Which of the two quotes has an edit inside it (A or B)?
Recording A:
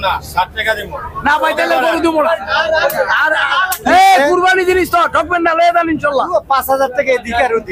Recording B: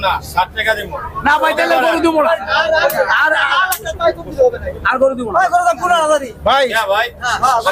A